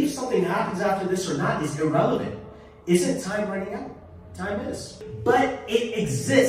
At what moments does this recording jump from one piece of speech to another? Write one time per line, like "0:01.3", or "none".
0:05.0